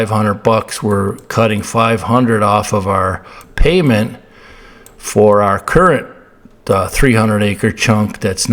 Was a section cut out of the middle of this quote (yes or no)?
no